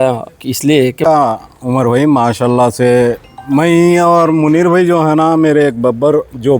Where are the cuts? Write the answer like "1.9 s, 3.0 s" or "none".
1.0 s